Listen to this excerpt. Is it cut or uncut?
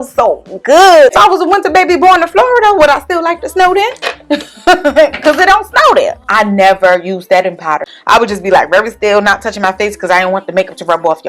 cut